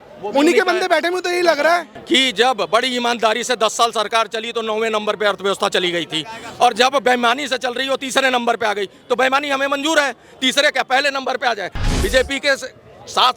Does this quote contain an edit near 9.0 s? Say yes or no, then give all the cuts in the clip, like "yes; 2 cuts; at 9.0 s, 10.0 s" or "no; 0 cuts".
no; 2 cuts; at 1.9 s, 11.9 s